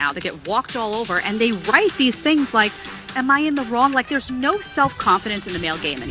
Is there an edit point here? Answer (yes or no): no